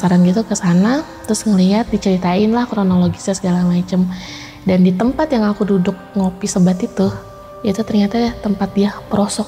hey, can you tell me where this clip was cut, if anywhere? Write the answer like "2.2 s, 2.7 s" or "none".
none